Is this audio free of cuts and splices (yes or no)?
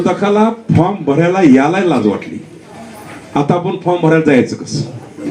yes